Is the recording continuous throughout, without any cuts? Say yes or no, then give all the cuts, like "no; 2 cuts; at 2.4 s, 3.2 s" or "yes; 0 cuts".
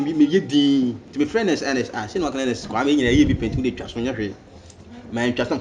yes; 0 cuts